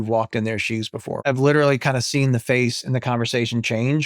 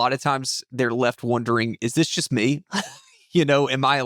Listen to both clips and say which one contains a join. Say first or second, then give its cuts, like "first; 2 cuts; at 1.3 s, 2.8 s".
first; 1 cut; at 1.2 s